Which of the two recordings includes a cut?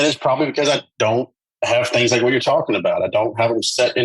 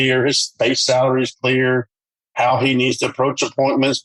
first; 1 cut; at 1.4 s

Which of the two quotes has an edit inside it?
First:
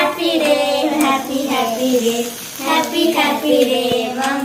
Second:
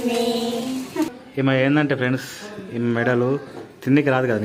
second; 1 cut; at 1.1 s

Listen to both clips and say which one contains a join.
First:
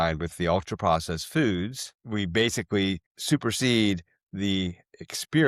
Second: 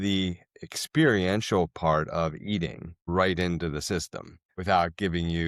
second; 2 cuts; at 3.0 s, 4.5 s

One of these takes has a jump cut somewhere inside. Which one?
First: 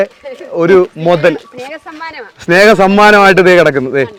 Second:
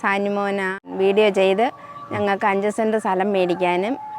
second; 1 cut; at 0.9 s

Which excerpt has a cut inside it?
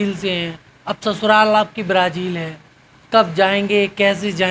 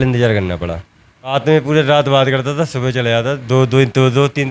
second; 1 cut; at 1.3 s

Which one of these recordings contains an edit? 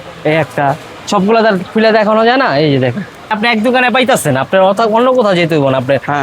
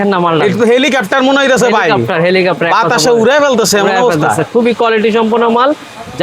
first; 1 cut; at 3.3 s

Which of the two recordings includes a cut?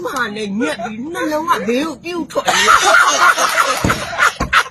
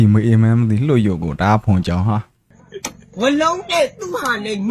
second; 1 cut; at 2.6 s

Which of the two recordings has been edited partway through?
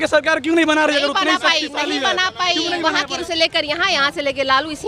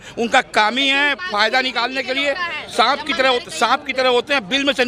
first; 1 cut; at 3.2 s

